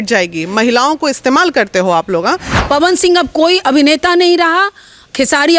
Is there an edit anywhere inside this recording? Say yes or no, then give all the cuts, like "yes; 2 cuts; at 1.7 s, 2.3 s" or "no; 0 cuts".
yes; 1 cut; at 2.5 s